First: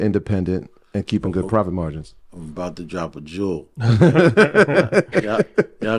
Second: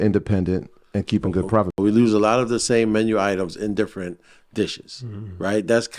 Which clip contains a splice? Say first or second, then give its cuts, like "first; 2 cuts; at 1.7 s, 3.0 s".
second; 1 cut; at 1.7 s